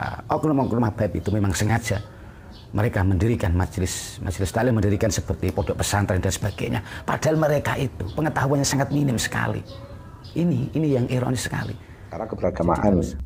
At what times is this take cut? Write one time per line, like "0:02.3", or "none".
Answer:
0:12.3